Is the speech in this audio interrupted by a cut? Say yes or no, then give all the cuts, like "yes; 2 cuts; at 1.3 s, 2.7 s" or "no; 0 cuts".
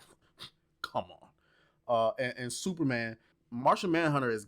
yes; 1 cut; at 3.3 s